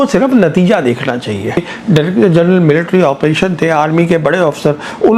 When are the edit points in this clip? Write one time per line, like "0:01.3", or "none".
0:01.6